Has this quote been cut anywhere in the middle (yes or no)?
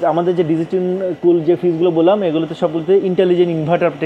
no